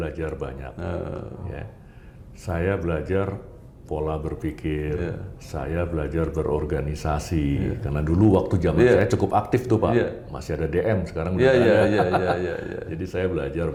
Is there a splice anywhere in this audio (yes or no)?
no